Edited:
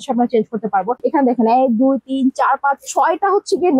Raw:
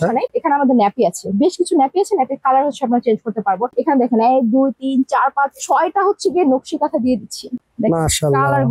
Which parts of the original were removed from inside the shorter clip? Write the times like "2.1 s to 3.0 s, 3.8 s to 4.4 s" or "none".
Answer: none